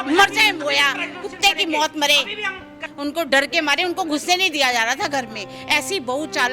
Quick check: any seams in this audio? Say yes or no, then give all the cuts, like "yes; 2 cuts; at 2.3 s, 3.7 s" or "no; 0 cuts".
yes; 1 cut; at 2.8 s